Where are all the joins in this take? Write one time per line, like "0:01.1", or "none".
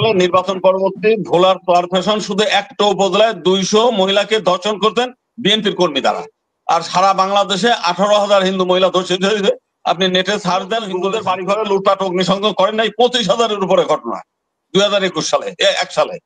0:11.1